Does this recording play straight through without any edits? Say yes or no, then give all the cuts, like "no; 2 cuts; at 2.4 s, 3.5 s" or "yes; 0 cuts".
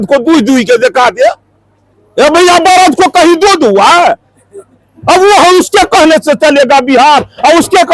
yes; 0 cuts